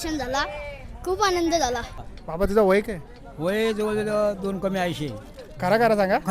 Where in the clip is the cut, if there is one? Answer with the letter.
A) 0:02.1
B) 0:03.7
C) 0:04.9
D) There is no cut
A